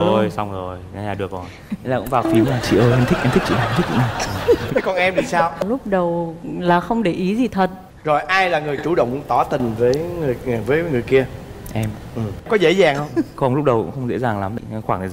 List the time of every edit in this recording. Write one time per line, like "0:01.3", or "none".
none